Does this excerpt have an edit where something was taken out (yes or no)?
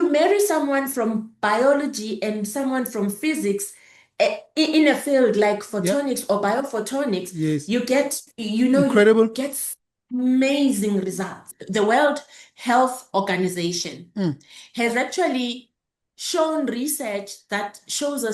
yes